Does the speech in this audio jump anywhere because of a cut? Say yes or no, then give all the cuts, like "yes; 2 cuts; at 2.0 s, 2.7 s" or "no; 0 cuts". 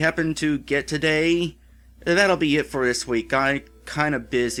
no; 0 cuts